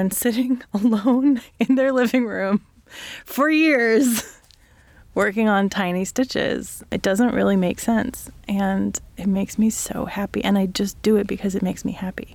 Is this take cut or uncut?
uncut